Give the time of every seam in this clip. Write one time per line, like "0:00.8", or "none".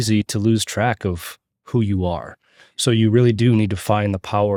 none